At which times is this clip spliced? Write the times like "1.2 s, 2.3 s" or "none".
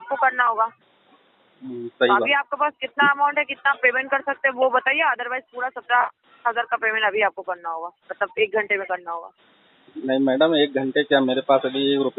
none